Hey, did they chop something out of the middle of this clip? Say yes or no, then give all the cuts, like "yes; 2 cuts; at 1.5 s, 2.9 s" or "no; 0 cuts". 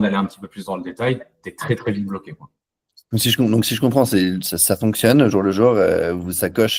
no; 0 cuts